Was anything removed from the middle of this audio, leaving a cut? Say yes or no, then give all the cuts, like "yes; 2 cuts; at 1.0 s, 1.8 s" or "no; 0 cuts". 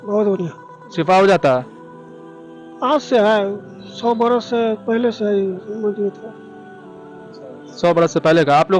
no; 0 cuts